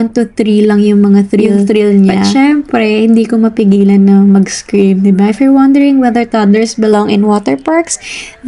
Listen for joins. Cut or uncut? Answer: uncut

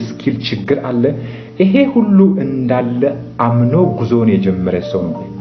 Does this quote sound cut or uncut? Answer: uncut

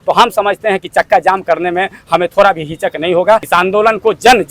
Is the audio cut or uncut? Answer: cut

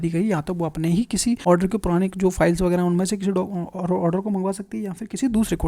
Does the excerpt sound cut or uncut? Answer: cut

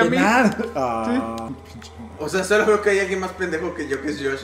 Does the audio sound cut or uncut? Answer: cut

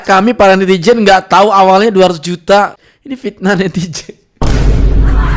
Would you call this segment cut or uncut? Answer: uncut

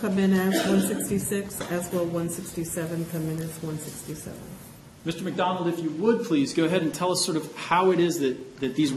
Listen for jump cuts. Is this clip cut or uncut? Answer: uncut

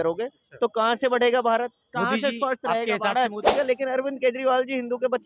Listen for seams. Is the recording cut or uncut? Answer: cut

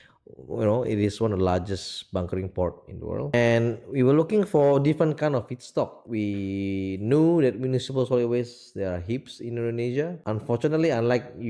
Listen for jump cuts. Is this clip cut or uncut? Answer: cut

